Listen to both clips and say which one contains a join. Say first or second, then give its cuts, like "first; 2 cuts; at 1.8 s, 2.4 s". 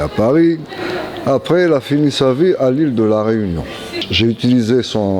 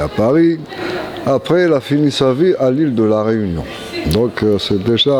first; 1 cut; at 3.9 s